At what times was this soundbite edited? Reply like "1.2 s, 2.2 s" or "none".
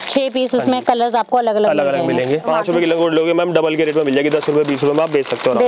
2.5 s